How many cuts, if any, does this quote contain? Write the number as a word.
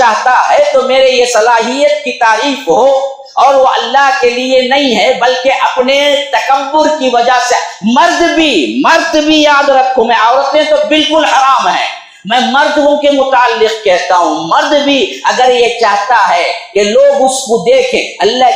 zero